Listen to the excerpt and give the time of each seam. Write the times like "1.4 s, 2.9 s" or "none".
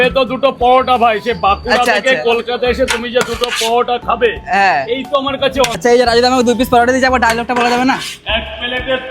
5.8 s